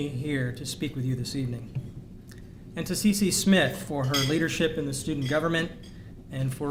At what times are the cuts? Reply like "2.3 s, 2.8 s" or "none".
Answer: none

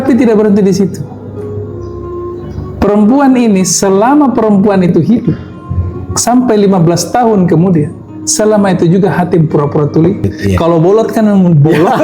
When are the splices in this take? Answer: 10.3 s

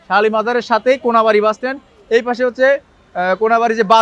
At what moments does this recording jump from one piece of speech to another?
none

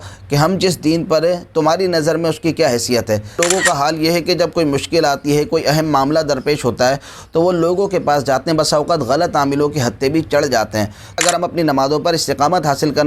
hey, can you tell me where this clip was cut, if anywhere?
3.4 s, 11.2 s

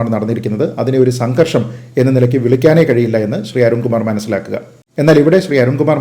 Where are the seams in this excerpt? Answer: 4.8 s

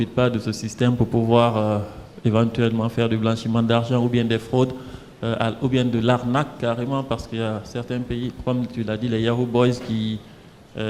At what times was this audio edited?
none

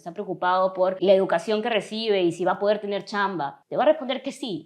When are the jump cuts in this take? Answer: 1.0 s, 3.5 s

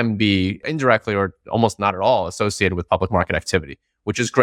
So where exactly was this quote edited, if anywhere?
none

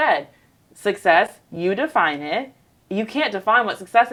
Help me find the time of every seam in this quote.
none

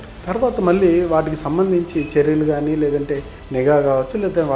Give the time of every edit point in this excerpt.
3.4 s

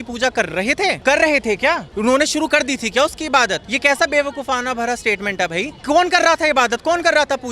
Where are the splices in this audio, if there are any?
1.0 s, 1.9 s, 3.7 s, 5.8 s

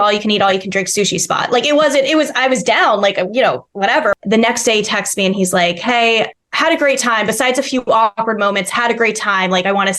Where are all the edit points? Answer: 4.2 s, 6.4 s

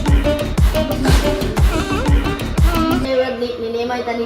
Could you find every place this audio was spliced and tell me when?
3.1 s

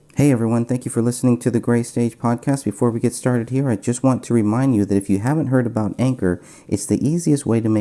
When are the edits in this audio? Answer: 1.4 s

